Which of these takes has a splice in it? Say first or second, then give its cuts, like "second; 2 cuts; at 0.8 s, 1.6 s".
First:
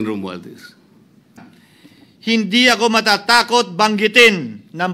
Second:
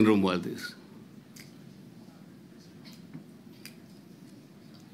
first; 1 cut; at 1.4 s